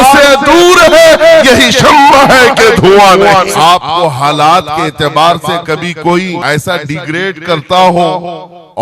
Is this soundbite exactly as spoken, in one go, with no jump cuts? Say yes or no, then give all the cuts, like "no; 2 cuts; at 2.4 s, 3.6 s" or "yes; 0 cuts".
no; 2 cuts; at 3.5 s, 6.4 s